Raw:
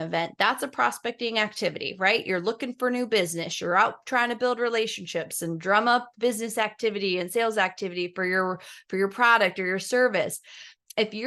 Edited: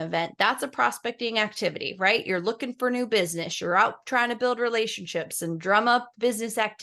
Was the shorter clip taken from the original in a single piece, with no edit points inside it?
yes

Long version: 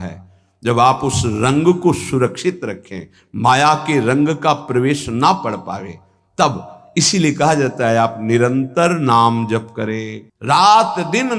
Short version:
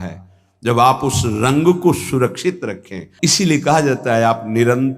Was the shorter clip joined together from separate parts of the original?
yes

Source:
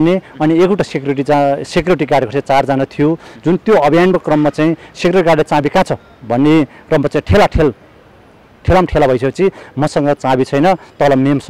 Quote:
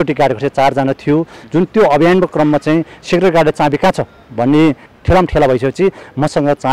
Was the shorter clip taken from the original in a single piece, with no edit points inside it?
no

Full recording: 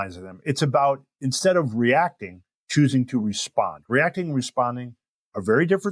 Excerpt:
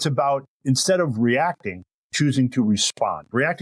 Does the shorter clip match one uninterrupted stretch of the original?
yes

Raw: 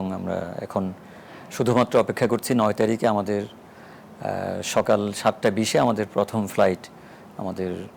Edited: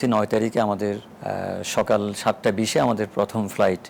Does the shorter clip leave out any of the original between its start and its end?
yes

